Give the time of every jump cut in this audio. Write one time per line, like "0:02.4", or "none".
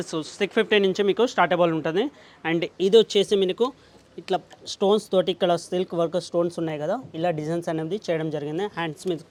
none